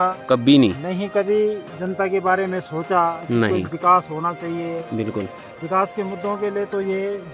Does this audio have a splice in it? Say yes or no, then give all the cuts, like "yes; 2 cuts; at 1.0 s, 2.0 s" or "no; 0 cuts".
no; 0 cuts